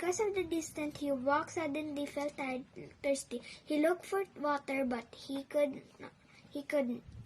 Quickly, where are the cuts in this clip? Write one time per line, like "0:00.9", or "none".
0:03.8